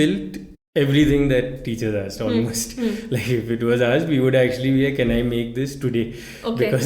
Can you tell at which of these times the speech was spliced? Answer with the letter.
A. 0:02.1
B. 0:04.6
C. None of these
C